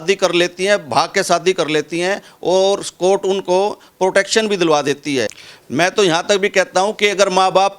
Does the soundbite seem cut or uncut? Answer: cut